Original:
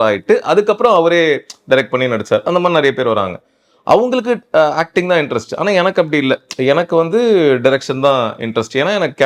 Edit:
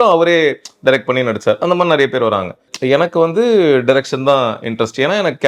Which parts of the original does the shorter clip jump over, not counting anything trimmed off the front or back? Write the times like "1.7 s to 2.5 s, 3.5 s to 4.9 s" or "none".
3.6 s to 6.5 s